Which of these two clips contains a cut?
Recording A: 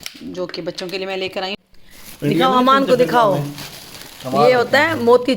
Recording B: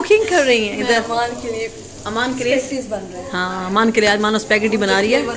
A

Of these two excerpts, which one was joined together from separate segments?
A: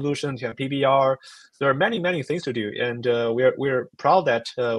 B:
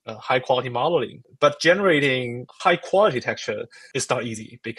B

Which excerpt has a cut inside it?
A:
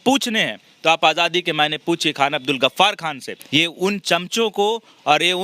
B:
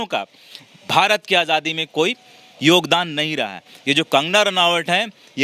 A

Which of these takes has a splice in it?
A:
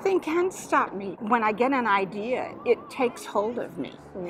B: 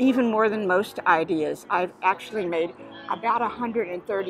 A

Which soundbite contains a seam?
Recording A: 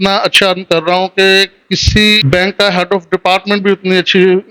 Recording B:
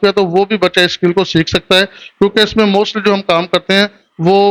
A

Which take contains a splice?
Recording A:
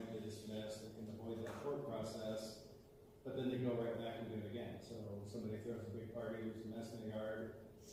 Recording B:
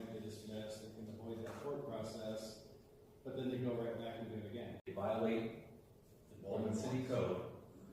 B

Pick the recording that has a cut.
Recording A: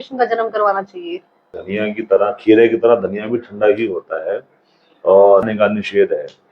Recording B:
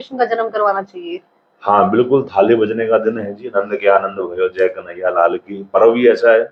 A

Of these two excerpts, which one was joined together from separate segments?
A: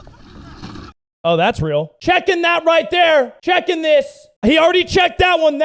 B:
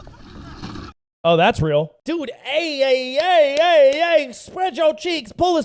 A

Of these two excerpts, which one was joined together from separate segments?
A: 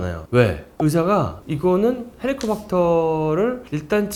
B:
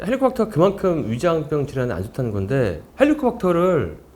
B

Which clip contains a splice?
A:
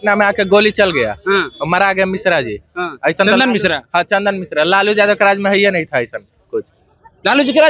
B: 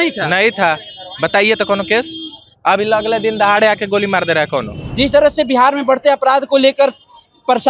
B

